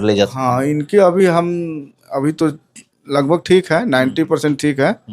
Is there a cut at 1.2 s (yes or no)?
no